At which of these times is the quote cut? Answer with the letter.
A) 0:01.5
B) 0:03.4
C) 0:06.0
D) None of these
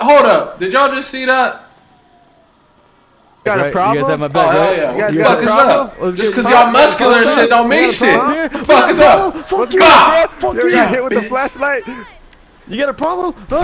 B